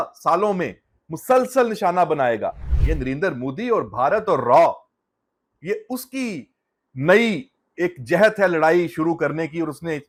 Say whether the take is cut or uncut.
uncut